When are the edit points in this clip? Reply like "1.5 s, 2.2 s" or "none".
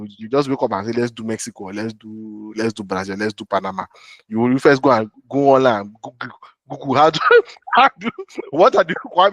none